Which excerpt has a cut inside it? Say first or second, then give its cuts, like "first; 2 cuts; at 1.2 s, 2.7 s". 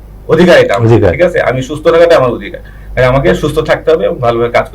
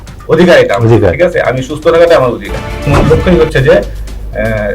second; 1 cut; at 2.9 s